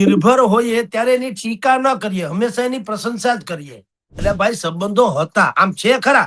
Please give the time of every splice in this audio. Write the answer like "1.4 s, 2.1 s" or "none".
4.1 s